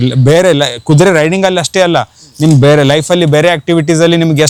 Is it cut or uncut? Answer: uncut